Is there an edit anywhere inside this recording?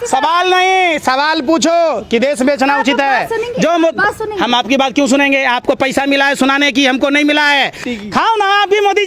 yes; 1 cut; at 7.9 s

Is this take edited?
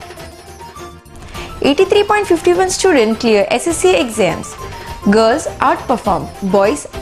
yes; 1 cut; at 1.0 s

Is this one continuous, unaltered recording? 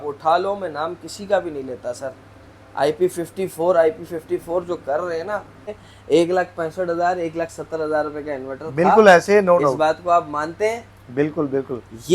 no; 1 cut; at 5.8 s

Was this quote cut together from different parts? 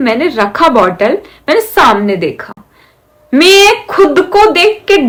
no; 0 cuts

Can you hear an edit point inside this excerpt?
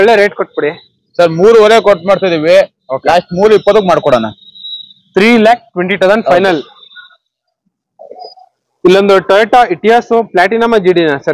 no; 0 cuts

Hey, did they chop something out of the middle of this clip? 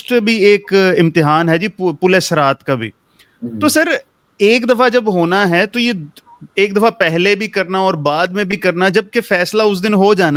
no; 0 cuts

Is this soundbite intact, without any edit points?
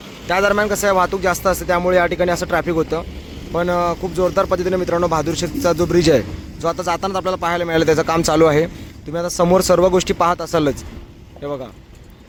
yes; 0 cuts

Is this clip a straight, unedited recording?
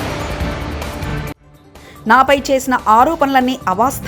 yes; 0 cuts

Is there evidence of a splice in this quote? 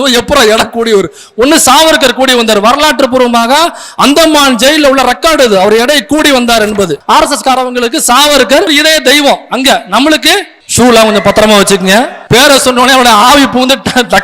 yes; 4 cuts; at 7.0 s, 8.7 s, 10.6 s, 12.2 s

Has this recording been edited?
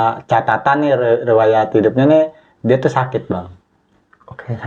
no; 0 cuts

